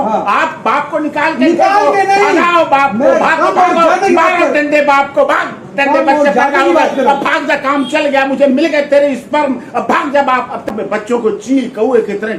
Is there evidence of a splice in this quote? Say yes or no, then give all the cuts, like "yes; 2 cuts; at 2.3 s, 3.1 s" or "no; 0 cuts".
yes; 1 cut; at 10.7 s